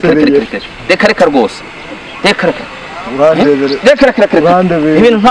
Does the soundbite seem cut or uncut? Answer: uncut